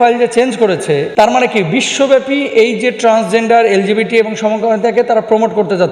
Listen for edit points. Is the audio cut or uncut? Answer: cut